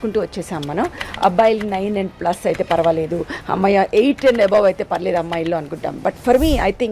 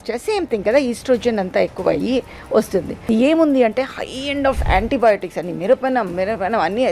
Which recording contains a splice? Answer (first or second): second